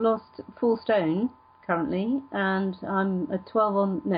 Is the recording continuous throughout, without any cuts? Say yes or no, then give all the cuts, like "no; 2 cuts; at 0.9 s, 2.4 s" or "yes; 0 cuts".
yes; 0 cuts